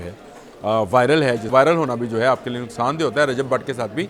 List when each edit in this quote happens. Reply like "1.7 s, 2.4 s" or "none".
1.5 s